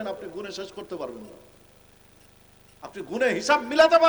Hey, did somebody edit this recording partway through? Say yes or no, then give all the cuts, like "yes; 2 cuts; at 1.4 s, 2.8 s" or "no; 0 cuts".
no; 0 cuts